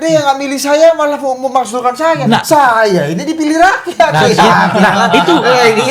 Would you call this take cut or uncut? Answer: uncut